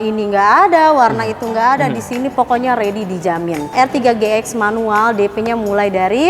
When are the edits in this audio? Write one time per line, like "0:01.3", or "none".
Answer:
0:03.7